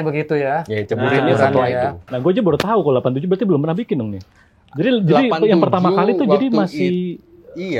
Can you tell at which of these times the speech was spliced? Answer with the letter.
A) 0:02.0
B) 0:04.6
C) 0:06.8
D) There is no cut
A